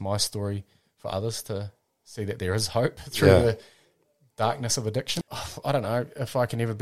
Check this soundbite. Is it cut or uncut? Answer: cut